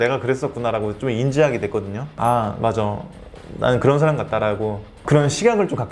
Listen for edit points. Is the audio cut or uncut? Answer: cut